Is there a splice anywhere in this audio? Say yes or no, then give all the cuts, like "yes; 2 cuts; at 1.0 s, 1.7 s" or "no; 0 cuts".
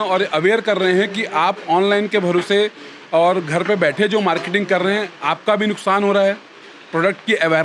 no; 0 cuts